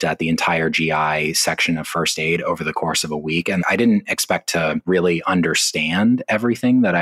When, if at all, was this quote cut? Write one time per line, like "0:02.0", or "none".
0:03.6